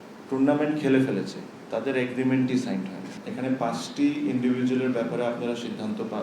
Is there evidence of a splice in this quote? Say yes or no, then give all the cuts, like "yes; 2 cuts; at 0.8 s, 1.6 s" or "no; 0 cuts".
yes; 1 cut; at 3.2 s